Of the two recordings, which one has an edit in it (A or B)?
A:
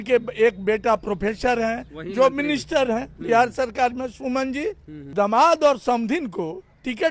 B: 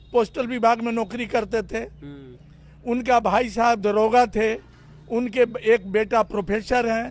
A